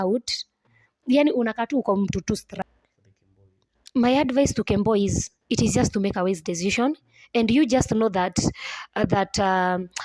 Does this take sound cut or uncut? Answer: cut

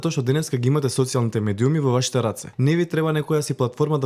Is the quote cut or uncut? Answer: cut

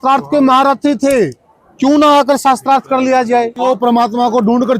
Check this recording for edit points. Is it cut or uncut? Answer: cut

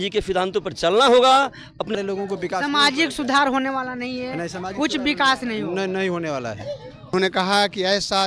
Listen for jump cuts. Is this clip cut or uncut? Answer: cut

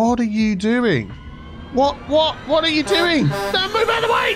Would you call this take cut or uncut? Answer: cut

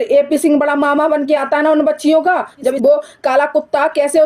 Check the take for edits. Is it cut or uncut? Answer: cut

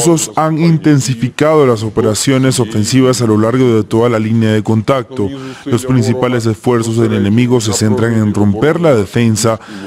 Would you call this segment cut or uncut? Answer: uncut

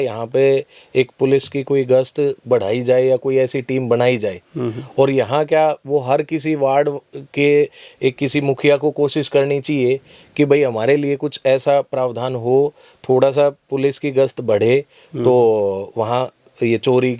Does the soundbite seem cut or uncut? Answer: uncut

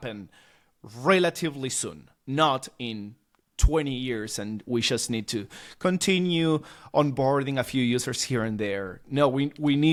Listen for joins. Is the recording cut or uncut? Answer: uncut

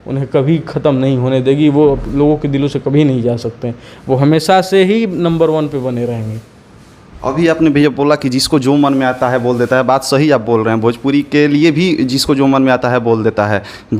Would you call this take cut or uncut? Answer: uncut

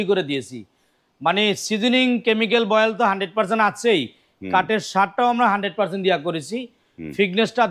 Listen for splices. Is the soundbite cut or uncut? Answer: uncut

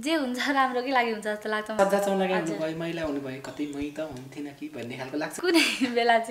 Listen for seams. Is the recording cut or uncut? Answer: cut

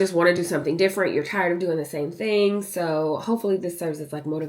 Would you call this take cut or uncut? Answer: uncut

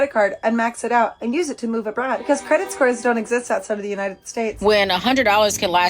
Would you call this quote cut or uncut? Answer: cut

